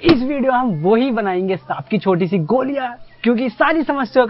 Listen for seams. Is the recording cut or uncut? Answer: uncut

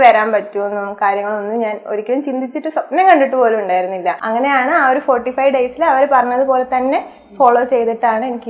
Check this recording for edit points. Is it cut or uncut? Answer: cut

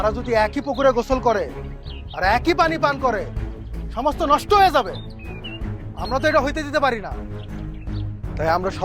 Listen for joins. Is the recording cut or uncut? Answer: uncut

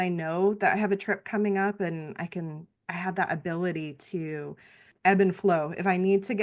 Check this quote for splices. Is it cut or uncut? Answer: cut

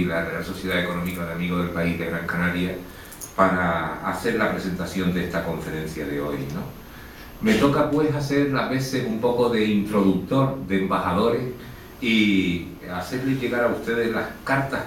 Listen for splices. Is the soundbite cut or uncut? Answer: cut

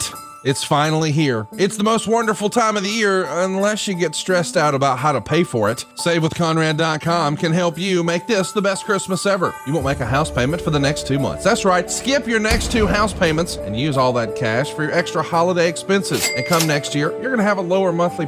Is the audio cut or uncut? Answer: uncut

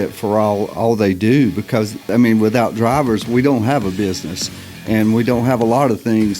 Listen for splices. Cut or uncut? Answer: cut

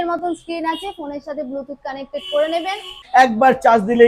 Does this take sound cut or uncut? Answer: cut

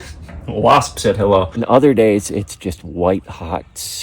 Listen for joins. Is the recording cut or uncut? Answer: cut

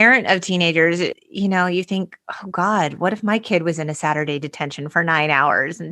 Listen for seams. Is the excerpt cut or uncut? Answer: cut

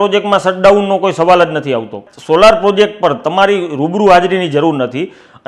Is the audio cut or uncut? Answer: cut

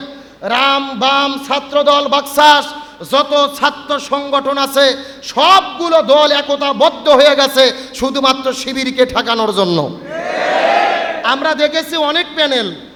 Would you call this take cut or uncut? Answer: uncut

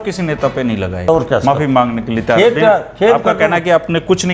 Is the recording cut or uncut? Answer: cut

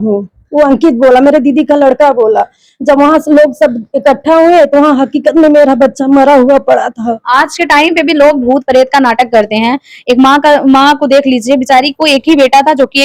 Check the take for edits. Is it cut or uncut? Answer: uncut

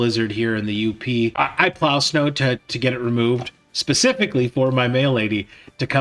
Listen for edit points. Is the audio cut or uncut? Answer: cut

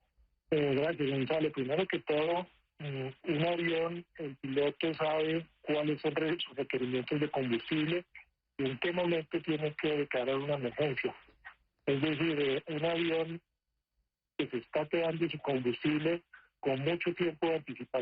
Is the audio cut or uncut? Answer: cut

